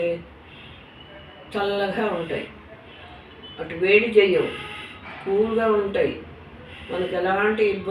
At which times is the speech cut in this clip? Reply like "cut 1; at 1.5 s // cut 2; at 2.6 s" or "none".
none